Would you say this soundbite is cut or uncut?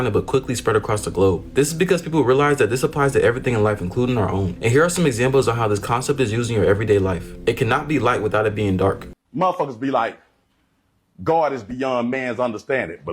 cut